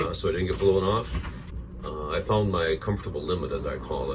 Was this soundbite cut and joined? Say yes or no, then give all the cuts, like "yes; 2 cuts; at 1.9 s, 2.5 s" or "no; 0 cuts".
no; 0 cuts